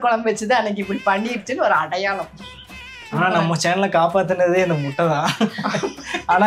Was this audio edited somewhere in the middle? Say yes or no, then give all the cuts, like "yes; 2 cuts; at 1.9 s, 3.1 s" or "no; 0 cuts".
yes; 1 cut; at 2.9 s